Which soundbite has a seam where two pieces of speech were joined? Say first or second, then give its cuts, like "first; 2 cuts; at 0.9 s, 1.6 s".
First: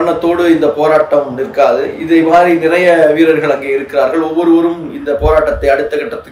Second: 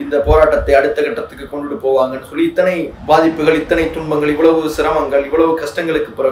second; 1 cut; at 2.9 s